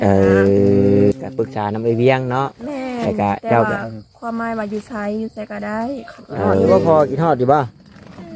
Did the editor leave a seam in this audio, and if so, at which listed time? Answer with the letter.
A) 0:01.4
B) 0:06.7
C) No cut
B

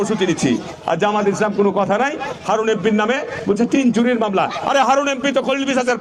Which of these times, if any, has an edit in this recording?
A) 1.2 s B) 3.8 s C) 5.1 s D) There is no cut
D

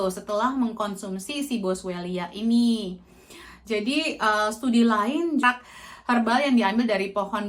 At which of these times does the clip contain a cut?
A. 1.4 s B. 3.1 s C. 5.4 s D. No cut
C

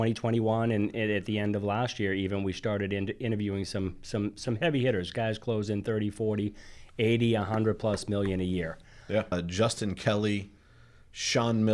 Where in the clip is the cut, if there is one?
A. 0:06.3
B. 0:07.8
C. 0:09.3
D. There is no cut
C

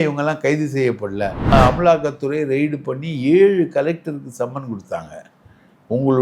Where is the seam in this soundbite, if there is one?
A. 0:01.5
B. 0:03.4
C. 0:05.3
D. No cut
A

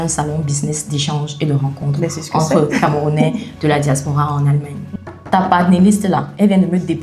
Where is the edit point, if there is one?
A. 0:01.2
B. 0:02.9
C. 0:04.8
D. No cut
C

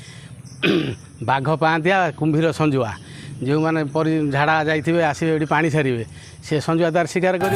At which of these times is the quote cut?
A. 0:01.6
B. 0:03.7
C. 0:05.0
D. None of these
D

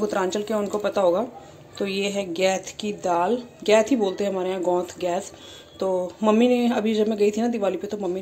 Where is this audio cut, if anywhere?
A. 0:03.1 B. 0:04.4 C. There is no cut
C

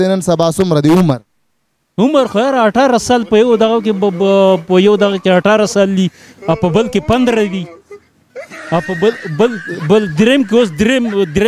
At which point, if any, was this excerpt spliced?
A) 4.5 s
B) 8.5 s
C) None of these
C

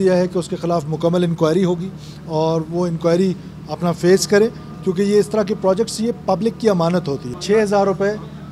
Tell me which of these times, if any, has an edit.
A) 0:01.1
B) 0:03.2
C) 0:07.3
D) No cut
C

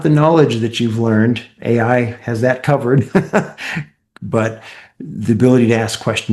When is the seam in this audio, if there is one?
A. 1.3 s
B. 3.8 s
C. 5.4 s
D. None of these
D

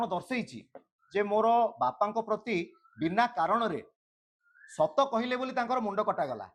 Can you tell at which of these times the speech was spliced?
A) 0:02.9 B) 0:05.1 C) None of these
C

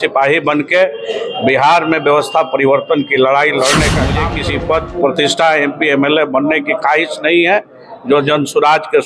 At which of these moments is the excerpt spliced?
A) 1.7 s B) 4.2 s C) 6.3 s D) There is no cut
B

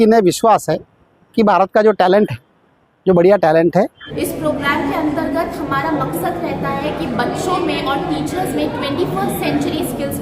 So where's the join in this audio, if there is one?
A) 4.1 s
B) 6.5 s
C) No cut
A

